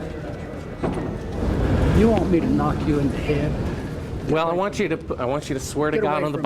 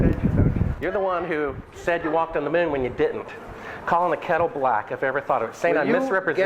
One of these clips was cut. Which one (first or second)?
first